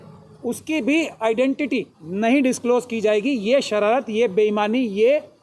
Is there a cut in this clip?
yes; 1 cut; at 2.0 s

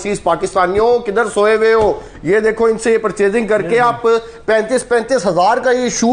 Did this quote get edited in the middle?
no; 0 cuts

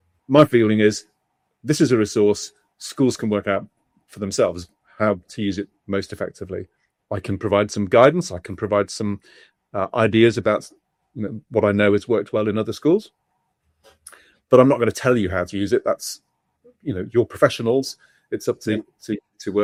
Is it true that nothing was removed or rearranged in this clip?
yes; 0 cuts

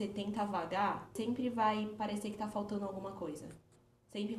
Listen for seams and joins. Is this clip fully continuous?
no; 1 cut; at 1.1 s

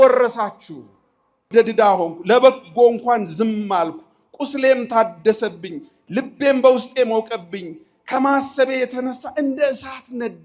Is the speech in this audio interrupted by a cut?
yes; 1 cut; at 1.5 s

